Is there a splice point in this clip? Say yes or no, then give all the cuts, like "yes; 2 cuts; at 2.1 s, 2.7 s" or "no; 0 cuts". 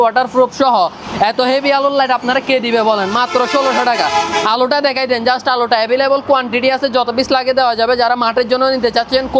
no; 0 cuts